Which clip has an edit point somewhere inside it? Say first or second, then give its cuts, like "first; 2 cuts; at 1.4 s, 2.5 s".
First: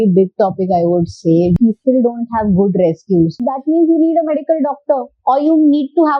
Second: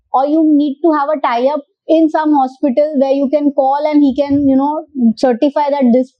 first; 2 cuts; at 1.5 s, 3.5 s